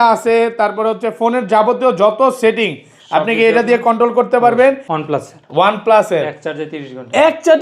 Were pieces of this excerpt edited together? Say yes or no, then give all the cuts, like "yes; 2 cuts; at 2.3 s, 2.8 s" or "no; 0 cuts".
yes; 1 cut; at 4.9 s